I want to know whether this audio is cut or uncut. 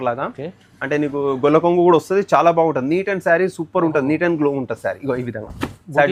uncut